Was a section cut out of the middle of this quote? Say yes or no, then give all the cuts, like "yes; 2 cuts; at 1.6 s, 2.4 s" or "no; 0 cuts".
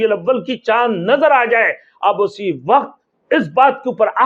no; 0 cuts